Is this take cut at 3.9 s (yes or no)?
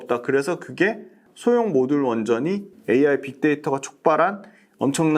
no